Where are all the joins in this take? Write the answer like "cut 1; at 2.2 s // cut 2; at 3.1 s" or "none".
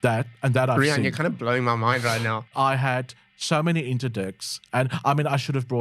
cut 1; at 2.5 s